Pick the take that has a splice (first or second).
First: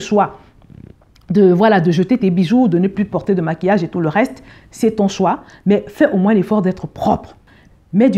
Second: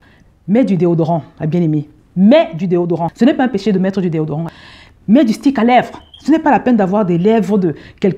second